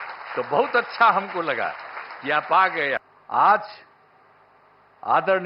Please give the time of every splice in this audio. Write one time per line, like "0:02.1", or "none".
0:03.1